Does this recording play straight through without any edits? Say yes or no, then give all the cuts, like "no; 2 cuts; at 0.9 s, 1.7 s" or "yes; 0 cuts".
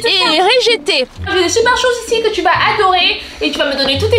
no; 1 cut; at 1.3 s